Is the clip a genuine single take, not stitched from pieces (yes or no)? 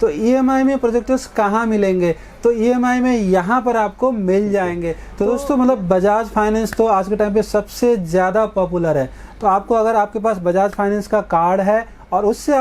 no